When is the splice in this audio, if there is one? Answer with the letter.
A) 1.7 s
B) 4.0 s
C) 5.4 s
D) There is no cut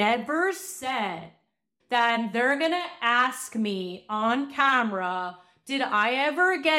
A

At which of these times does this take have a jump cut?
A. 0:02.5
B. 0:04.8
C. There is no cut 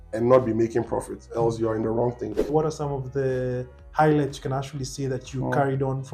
A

